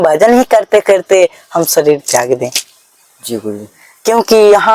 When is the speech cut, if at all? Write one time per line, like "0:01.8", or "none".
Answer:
none